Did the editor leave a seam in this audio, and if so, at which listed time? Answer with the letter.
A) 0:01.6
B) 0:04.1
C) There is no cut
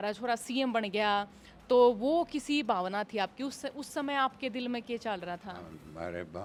C